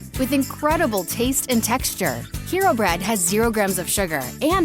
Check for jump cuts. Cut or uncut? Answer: uncut